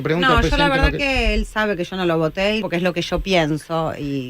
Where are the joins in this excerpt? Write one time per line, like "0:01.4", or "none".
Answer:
0:02.6